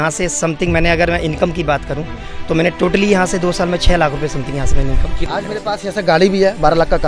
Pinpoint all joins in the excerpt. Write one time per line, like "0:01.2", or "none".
0:05.1